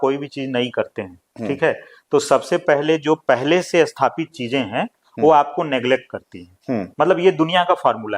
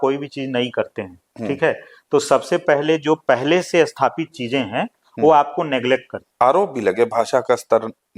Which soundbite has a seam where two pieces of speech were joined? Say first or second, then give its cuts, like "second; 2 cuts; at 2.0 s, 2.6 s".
second; 1 cut; at 6.2 s